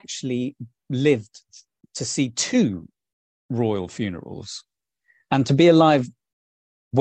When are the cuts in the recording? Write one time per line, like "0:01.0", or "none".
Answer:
none